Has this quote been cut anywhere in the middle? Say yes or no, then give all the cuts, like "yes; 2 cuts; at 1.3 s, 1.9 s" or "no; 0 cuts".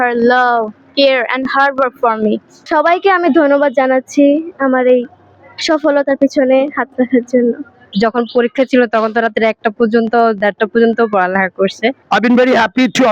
yes; 3 cuts; at 2.7 s, 7.8 s, 12.0 s